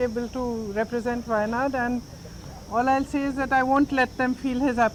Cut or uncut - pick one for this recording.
uncut